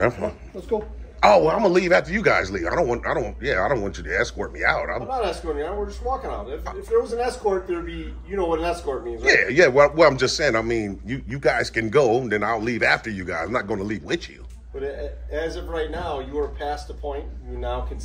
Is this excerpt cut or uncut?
uncut